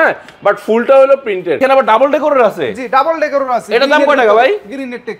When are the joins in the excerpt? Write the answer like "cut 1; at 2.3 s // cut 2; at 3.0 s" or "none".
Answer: cut 1; at 1.6 s